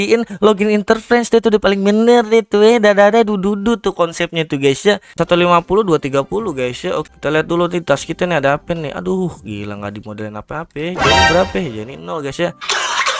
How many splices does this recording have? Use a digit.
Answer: 1